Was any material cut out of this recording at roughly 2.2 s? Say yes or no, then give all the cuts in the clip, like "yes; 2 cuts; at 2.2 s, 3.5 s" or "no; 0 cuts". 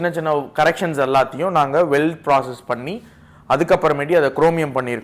no; 0 cuts